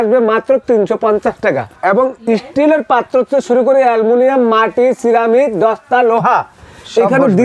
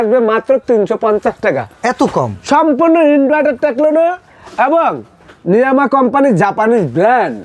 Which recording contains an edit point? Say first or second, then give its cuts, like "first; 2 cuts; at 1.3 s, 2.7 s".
first; 1 cut; at 1.7 s